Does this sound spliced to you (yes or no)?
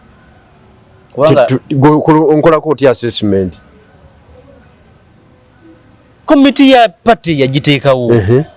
no